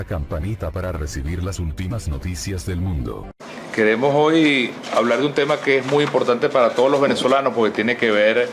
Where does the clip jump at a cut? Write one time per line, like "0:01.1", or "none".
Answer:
0:03.3